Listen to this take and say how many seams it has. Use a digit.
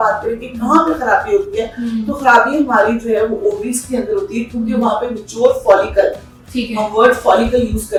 0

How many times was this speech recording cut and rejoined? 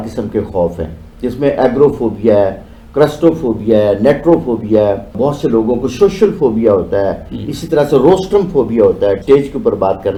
0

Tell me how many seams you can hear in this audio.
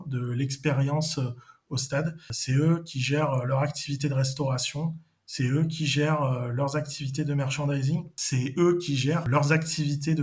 3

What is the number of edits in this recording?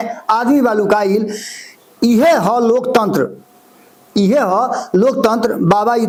0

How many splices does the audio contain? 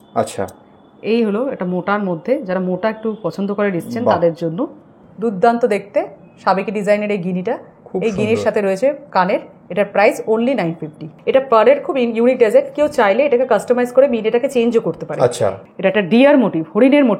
3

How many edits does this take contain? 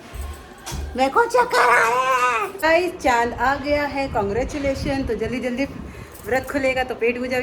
1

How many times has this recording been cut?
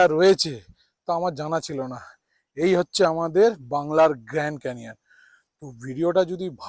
0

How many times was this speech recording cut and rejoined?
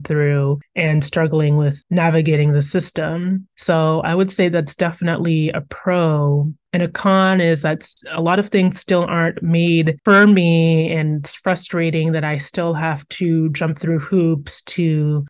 0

